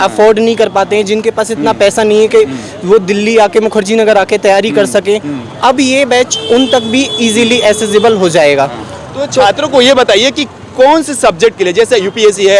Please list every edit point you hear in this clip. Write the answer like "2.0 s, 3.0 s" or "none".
none